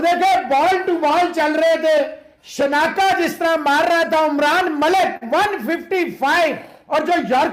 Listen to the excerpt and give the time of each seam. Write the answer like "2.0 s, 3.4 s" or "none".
none